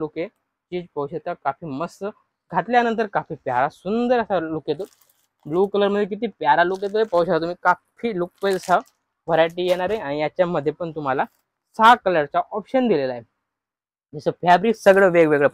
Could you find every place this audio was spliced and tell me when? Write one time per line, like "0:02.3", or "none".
none

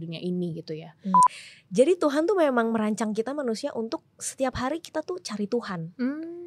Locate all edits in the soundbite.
0:01.3

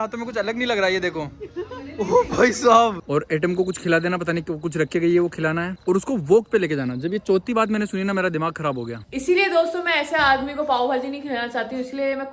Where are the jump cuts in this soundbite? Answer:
0:03.0
0:09.0

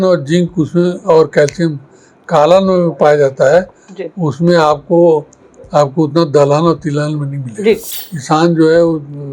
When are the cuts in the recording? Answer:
0:07.9

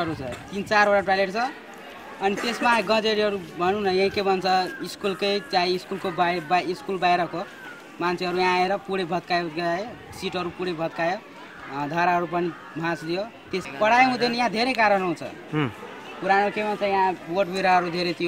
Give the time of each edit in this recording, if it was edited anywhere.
0:13.6

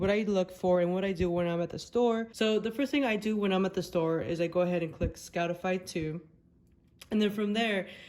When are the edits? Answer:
0:02.3

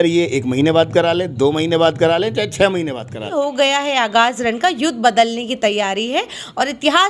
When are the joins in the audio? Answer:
0:03.1

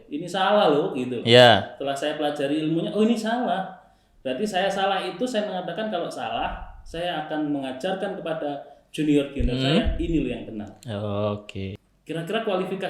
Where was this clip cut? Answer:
0:11.7

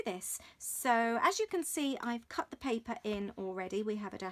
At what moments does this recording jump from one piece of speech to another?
0:01.1

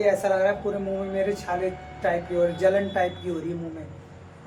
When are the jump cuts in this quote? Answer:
none

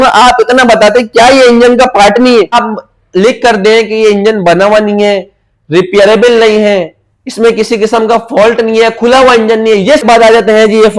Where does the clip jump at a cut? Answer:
0:02.6
0:10.0

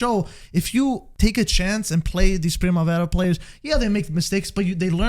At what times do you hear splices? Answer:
0:01.1

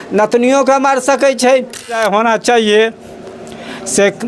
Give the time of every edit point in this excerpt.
0:02.0

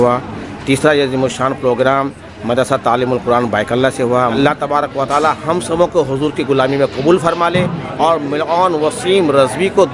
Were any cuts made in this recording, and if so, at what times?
0:04.3

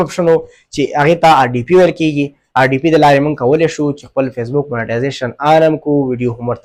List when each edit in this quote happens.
none

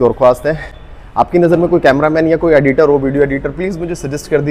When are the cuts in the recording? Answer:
none

